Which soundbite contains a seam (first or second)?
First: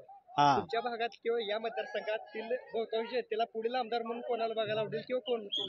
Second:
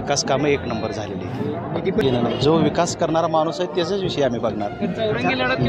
second